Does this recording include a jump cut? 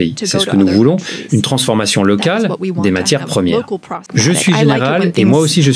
yes; 1 cut; at 4.1 s

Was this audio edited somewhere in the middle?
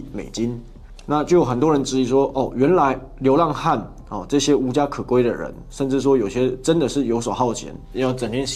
no; 0 cuts

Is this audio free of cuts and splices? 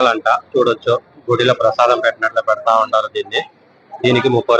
yes; 0 cuts

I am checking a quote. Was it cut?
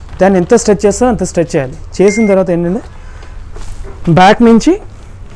no; 0 cuts

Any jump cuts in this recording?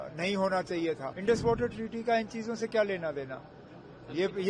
yes; 1 cut; at 1.1 s

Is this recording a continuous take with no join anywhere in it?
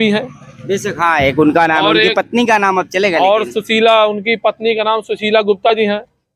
yes; 0 cuts

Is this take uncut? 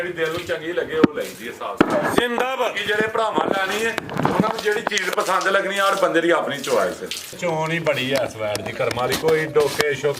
no; 1 cut; at 7.4 s

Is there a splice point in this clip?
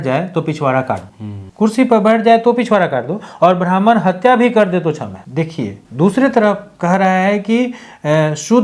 no; 0 cuts

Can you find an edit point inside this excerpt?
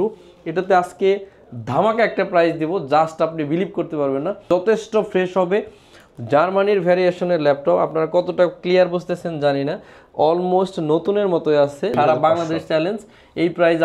yes; 2 cuts; at 4.4 s, 11.9 s

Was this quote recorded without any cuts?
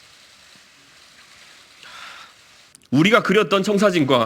no; 1 cut; at 2.7 s

